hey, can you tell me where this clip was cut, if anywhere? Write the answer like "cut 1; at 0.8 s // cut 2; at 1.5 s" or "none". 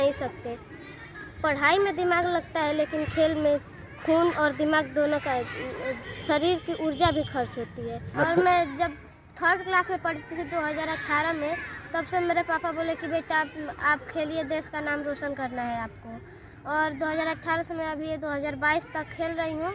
cut 1; at 8.0 s